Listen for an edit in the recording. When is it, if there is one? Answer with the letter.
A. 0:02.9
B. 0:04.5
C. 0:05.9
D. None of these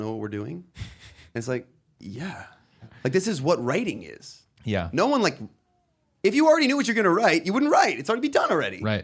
A